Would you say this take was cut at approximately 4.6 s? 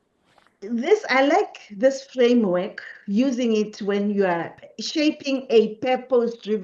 yes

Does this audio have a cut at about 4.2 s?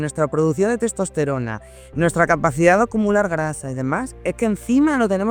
no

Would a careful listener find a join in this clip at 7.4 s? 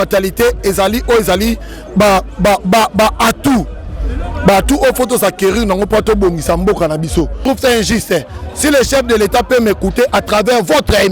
yes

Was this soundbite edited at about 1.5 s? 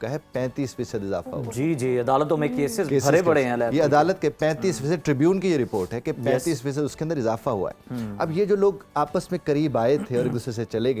no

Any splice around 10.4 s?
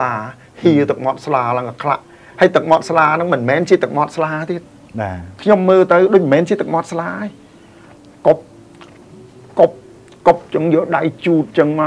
no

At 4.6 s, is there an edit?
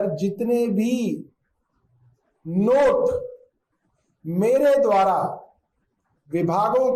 no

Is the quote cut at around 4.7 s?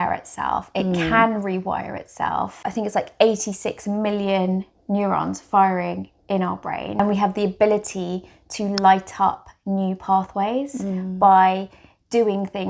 no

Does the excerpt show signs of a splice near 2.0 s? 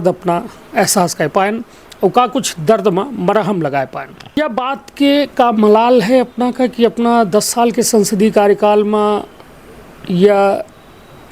no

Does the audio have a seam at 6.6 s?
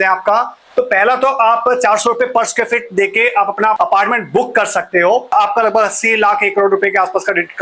no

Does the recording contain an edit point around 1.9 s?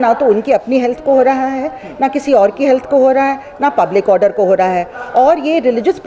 no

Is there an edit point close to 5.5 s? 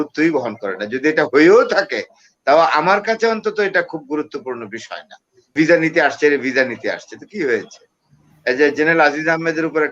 yes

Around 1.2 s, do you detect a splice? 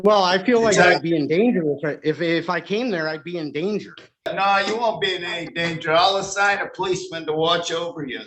no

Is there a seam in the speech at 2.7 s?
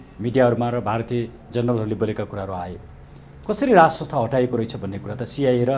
no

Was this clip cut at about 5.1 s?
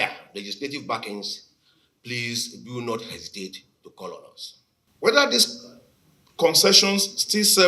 yes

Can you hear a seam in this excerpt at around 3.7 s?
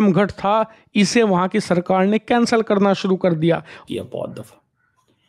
yes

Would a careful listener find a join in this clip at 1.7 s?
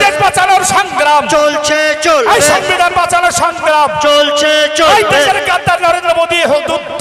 no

